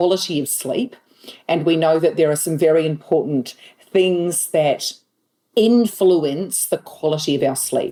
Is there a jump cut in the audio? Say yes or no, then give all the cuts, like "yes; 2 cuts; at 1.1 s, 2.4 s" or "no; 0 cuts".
no; 0 cuts